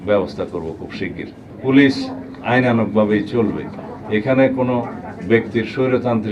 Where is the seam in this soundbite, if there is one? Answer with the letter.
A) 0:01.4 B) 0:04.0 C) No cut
A